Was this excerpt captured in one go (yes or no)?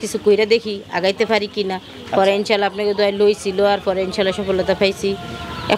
yes